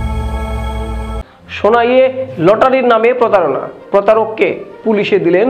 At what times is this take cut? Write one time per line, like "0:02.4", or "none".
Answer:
none